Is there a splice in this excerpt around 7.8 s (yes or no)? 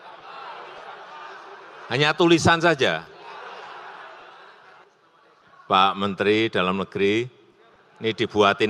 no